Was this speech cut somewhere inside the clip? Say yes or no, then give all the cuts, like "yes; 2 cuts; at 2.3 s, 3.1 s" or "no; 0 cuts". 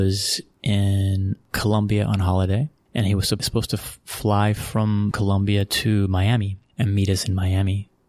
yes; 2 cuts; at 3.4 s, 5.2 s